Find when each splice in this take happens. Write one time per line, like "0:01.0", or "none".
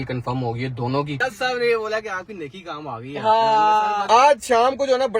0:01.2
0:04.0